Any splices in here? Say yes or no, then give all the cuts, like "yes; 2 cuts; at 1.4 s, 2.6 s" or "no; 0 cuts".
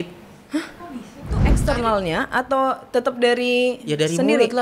yes; 1 cut; at 1.5 s